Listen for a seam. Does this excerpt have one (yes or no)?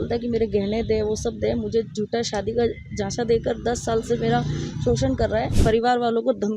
yes